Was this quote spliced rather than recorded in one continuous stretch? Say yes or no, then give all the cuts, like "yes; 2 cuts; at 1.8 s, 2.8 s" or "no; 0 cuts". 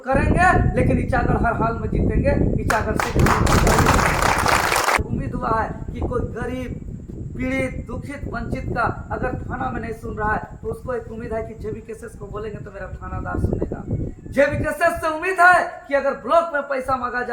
yes; 1 cut; at 5.0 s